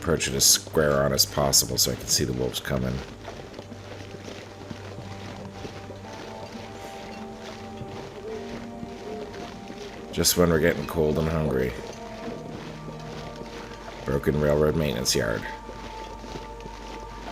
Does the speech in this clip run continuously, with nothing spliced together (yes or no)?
no